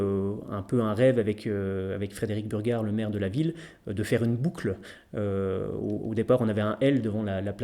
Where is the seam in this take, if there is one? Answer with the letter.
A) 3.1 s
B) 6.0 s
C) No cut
C